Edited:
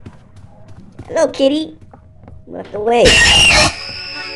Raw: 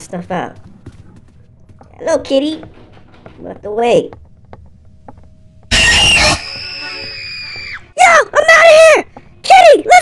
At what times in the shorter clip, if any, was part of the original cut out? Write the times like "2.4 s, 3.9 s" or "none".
3.2 s